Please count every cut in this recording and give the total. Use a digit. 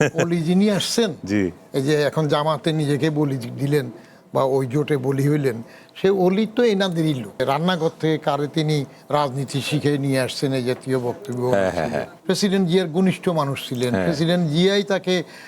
2